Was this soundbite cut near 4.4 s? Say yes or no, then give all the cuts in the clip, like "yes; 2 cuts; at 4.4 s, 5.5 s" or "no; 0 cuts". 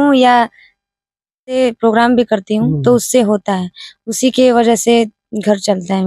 no; 1 cut; at 1.6 s